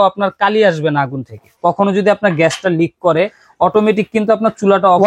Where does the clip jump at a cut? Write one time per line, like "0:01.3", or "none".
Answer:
0:01.5